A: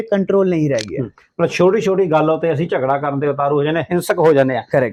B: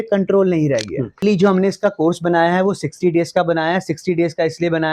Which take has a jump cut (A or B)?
B